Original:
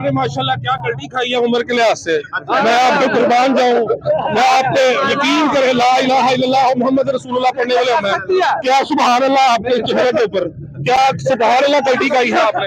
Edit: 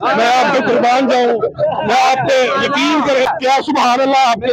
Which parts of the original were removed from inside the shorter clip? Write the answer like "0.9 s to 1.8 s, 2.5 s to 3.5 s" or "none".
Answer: 5.7 s to 8.5 s